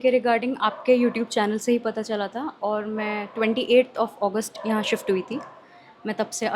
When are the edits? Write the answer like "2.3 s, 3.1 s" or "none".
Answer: none